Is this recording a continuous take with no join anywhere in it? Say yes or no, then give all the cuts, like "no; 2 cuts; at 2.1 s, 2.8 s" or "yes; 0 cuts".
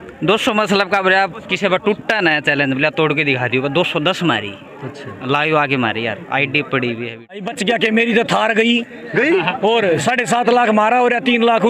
no; 1 cut; at 7.5 s